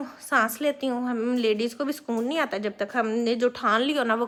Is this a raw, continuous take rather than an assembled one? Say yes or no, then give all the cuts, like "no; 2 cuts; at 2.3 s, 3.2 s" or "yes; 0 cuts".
yes; 0 cuts